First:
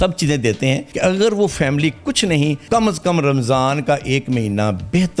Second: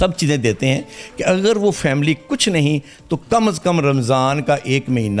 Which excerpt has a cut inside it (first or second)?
first